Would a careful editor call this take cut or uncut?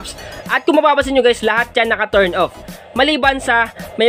uncut